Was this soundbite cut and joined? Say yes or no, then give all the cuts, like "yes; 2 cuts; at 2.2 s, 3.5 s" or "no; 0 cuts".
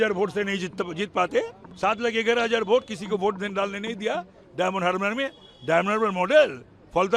yes; 1 cut; at 1.6 s